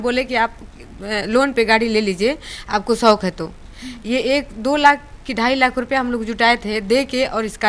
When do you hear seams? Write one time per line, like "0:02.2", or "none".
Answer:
none